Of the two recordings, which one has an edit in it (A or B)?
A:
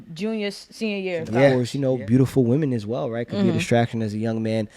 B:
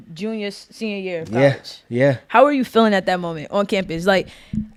A